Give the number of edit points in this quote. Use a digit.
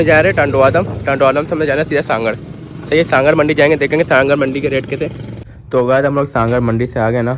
1